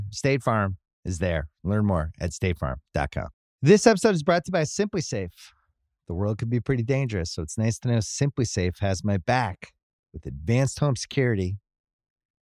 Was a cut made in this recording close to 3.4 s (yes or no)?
yes